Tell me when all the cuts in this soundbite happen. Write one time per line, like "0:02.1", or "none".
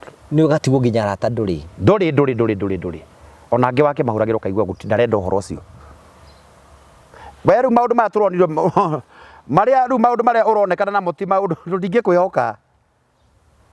none